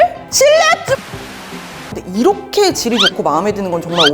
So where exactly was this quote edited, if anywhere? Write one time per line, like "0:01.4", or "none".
0:01.9